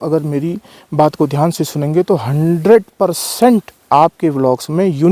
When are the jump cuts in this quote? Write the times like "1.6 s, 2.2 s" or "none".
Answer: 3.7 s